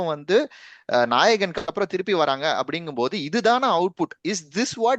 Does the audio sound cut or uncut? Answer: uncut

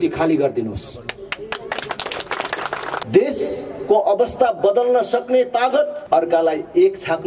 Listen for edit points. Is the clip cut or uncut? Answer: cut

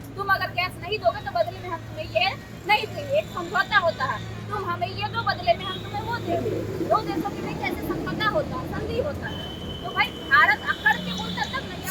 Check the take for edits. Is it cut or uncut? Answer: uncut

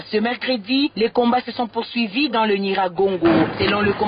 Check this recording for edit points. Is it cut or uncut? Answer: uncut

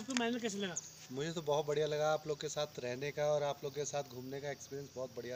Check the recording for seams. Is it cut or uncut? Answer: uncut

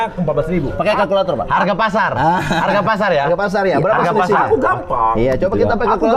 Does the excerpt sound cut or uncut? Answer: uncut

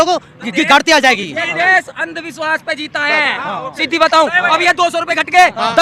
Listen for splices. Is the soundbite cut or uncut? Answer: uncut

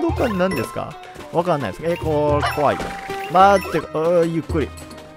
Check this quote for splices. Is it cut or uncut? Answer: uncut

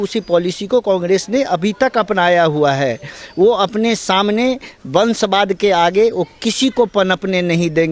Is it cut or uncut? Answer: uncut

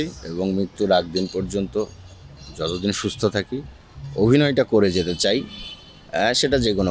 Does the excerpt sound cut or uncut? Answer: uncut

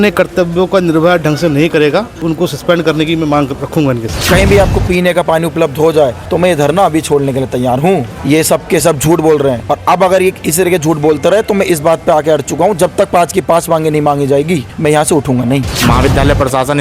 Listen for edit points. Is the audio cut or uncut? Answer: cut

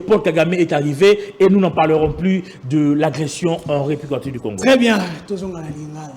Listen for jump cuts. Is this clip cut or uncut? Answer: uncut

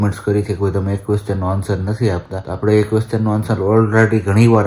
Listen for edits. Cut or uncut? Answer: cut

